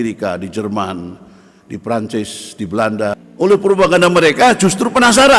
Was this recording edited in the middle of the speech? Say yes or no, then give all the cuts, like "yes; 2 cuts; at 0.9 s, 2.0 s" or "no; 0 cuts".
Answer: yes; 1 cut; at 3.2 s